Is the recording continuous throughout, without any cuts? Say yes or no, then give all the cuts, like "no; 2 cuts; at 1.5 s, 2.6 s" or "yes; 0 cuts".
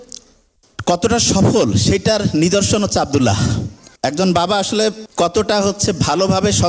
no; 1 cut; at 5.0 s